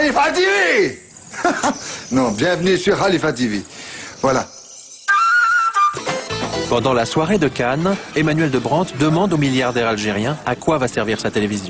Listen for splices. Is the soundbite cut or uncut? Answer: cut